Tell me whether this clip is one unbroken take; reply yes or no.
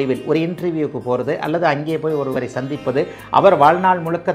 yes